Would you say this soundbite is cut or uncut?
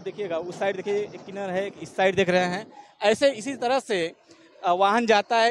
uncut